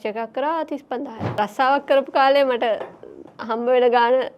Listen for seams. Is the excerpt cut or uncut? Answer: cut